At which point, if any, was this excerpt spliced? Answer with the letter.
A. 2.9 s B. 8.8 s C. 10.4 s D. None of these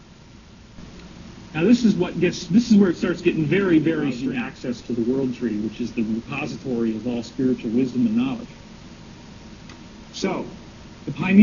A